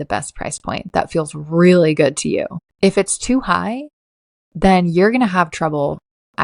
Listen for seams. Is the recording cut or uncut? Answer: cut